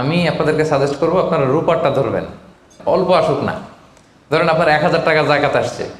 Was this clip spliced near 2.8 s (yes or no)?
yes